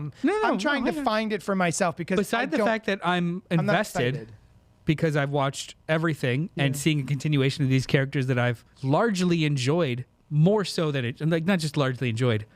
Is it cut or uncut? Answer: cut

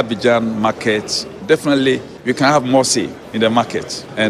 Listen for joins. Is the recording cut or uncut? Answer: cut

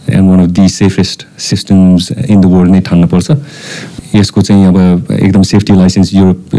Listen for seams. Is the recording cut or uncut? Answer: uncut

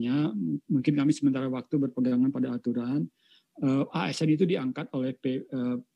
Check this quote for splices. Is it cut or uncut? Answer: uncut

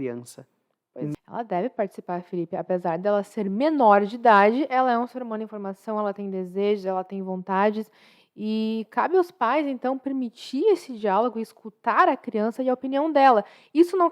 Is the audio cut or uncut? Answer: cut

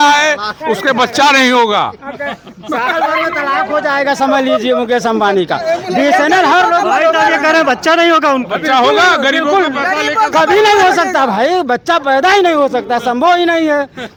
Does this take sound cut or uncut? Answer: uncut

